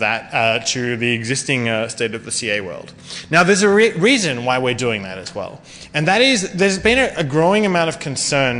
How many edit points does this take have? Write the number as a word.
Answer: zero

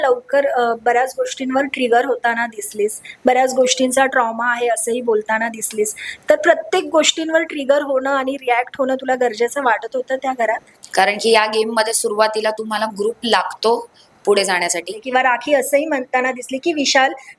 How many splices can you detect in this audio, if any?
two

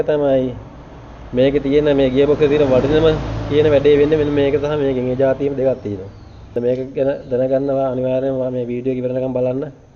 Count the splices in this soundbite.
zero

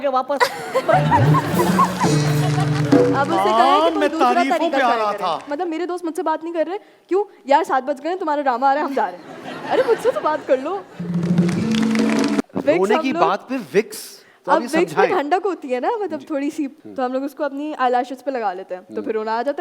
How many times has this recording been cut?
three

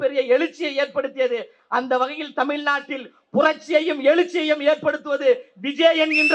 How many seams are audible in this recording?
zero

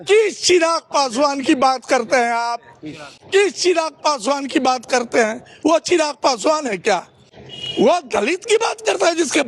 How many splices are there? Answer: zero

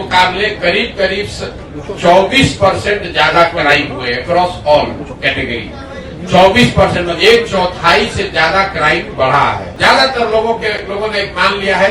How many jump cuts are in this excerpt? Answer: one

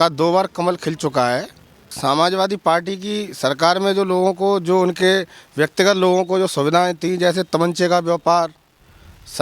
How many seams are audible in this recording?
one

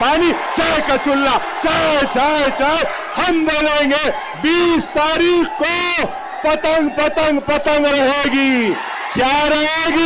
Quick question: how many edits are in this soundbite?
zero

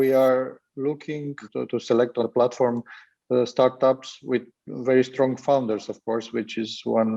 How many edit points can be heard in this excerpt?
zero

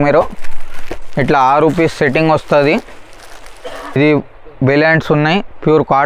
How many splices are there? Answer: one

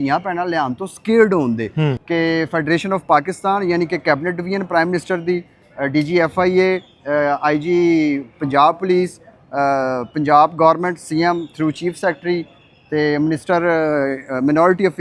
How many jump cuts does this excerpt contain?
one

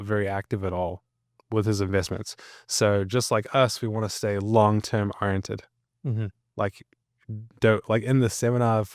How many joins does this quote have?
zero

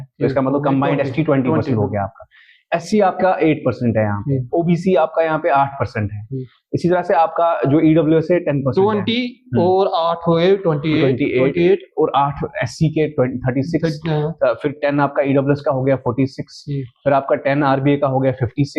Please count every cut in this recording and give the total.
zero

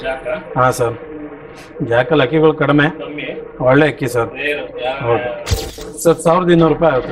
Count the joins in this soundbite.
one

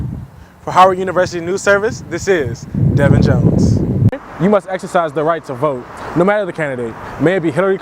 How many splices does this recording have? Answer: one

